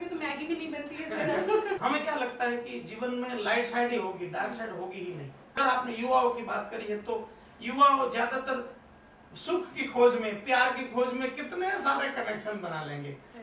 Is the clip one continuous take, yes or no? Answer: no